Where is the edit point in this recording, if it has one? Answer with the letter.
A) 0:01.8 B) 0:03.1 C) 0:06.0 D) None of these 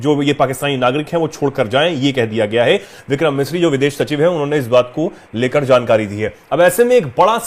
D